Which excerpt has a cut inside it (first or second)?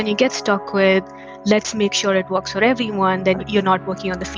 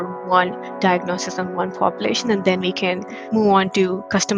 first